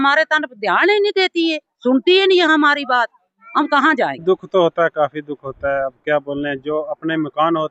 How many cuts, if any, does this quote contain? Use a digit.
1